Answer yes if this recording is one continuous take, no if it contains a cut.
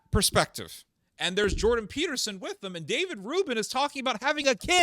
no